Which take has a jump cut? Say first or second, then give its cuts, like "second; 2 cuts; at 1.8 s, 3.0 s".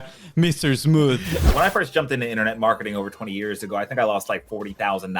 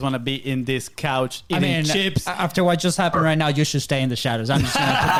first; 1 cut; at 1.5 s